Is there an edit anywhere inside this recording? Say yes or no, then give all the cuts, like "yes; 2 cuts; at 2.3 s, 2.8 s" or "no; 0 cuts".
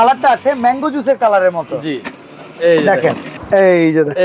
yes; 1 cut; at 3.3 s